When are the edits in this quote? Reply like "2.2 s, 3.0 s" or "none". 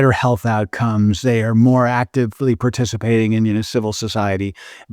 3.7 s